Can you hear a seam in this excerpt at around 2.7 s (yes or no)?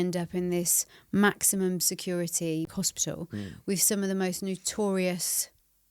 yes